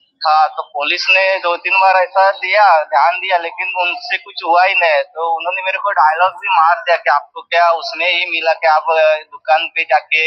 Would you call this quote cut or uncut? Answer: uncut